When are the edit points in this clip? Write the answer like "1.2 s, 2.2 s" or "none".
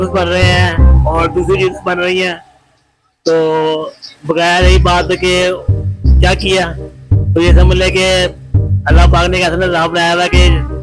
none